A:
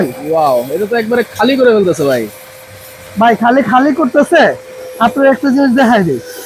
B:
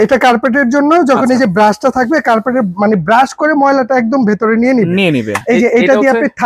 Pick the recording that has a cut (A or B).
B